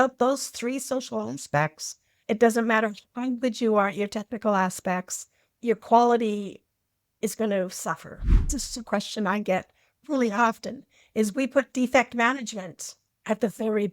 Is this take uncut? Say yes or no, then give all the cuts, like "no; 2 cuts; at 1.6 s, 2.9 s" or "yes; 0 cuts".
no; 1 cut; at 8.5 s